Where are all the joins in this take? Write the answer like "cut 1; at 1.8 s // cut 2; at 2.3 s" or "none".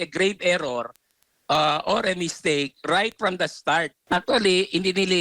cut 1; at 4.0 s